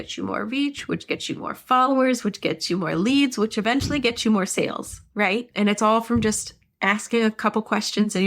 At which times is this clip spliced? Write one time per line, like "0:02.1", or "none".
0:05.5